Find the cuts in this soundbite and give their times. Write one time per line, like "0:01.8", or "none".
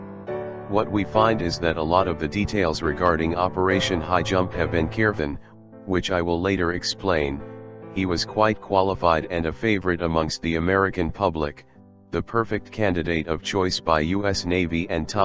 none